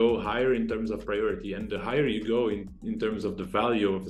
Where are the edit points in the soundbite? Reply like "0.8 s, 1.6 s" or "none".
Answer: none